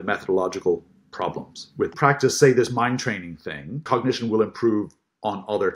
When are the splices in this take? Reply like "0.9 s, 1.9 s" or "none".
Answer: 1.9 s, 3.8 s